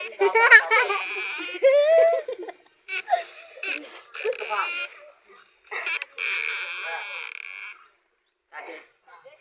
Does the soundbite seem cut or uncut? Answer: uncut